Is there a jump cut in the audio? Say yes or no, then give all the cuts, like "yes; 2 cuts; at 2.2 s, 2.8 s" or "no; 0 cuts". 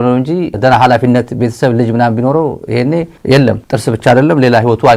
no; 0 cuts